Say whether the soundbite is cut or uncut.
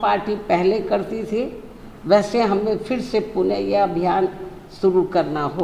uncut